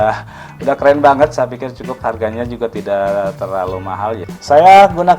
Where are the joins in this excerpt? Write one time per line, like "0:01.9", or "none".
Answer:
0:04.3

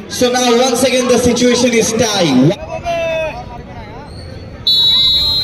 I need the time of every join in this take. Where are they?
0:02.6

